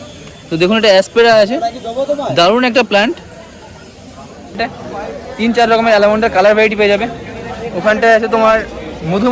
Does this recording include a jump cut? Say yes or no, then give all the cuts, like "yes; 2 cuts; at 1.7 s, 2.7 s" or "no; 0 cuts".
yes; 1 cut; at 4.6 s